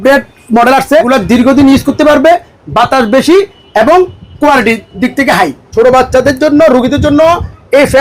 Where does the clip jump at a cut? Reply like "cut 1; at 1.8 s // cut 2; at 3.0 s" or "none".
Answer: cut 1; at 1.1 s // cut 2; at 5.6 s